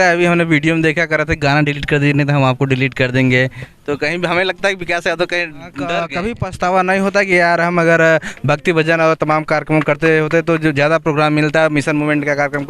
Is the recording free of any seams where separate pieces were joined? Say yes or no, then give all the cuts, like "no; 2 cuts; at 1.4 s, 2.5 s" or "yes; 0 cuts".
no; 1 cut; at 5.9 s